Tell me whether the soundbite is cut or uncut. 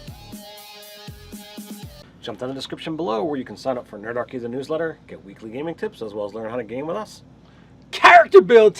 uncut